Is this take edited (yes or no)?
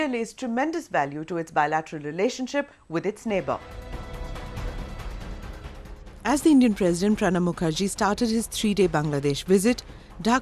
yes